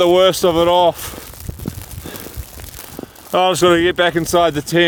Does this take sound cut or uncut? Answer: uncut